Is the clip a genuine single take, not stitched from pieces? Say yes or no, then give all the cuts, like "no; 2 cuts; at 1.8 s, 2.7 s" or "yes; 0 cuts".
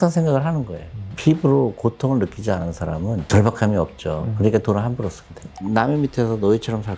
no; 2 cuts; at 1.1 s, 5.5 s